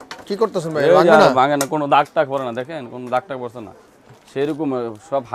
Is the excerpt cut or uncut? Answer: uncut